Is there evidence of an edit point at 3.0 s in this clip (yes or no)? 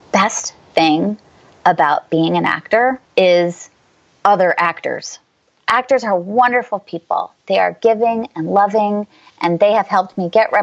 yes